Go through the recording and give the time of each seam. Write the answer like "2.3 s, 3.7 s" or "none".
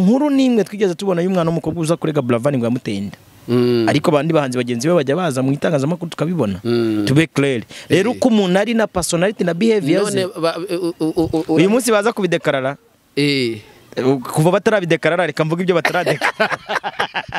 none